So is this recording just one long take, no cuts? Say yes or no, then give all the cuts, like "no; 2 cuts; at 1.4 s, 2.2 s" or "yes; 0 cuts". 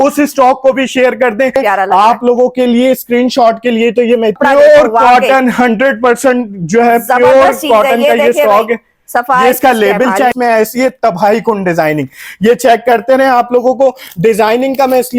no; 3 cuts; at 1.5 s, 4.4 s, 10.3 s